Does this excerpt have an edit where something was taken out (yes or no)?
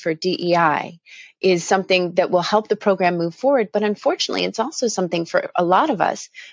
no